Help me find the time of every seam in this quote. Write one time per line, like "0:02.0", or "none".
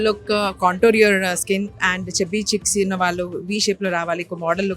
0:01.9